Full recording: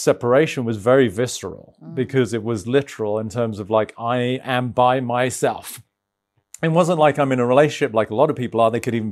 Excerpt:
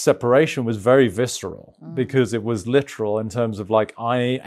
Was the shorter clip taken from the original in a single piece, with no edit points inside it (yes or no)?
yes